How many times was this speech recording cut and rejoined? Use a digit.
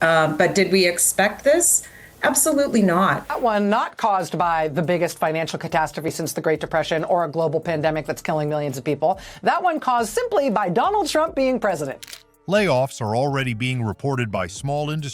0